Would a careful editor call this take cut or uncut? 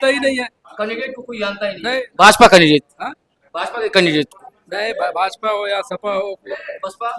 uncut